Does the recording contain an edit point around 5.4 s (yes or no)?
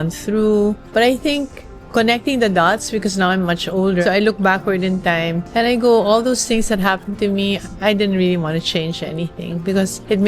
no